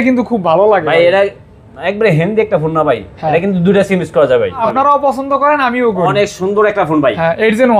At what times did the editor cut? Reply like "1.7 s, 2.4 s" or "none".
4.6 s

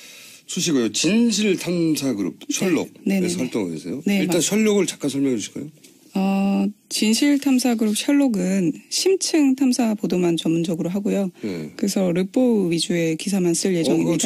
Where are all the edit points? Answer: none

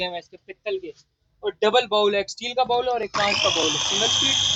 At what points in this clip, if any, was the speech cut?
none

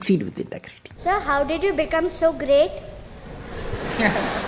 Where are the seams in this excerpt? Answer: 1.0 s

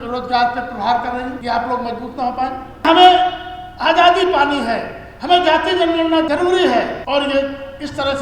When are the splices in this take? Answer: 1.4 s, 2.8 s, 6.3 s, 7.0 s

